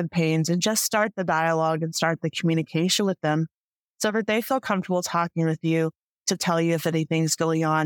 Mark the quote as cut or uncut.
uncut